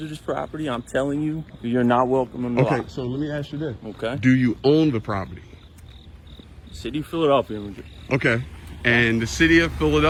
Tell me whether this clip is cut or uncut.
uncut